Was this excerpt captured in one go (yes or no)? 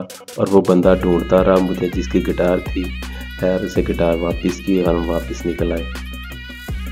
yes